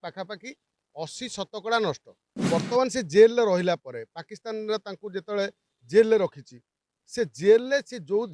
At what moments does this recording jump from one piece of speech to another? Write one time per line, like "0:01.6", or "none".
0:02.3